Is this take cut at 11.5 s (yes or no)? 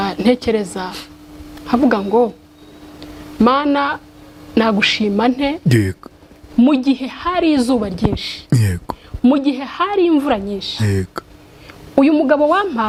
no